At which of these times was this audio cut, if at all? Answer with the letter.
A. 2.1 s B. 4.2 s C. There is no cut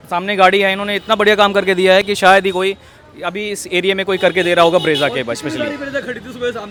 C